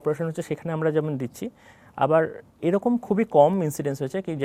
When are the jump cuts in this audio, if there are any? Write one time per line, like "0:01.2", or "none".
none